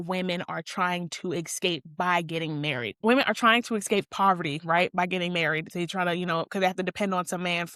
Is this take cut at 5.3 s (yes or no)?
no